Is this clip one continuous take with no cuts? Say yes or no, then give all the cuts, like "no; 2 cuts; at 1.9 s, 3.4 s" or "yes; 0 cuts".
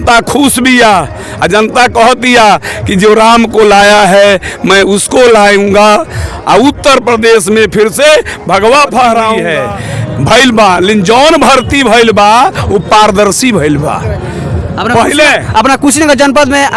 no; 1 cut; at 9.4 s